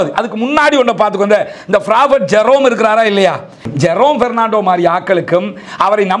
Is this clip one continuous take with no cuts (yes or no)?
no